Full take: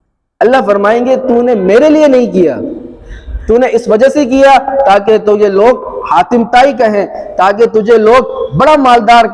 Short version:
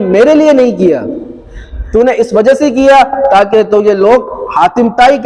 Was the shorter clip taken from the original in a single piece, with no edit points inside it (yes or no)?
yes